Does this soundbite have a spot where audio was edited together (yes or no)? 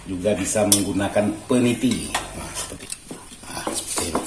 yes